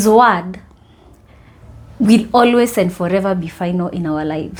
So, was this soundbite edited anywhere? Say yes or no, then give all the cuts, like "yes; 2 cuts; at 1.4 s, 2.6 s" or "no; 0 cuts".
no; 0 cuts